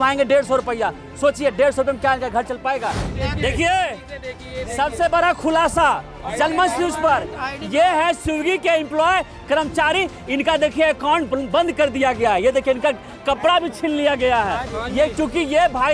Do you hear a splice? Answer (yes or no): yes